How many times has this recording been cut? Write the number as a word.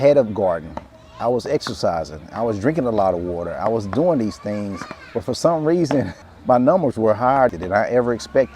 two